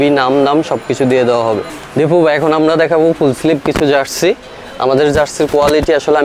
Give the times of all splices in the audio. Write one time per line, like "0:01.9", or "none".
0:01.8